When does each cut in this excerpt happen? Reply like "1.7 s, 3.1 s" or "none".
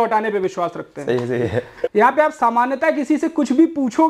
1.8 s